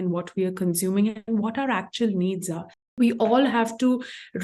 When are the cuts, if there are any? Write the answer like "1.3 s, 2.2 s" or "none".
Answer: 2.9 s